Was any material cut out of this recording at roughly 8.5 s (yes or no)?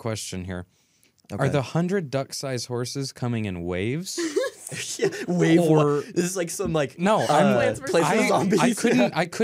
no